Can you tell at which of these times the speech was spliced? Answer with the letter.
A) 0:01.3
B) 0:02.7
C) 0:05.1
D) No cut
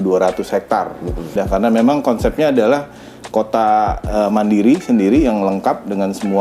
A